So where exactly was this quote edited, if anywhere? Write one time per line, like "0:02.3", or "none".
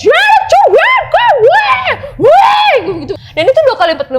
0:03.2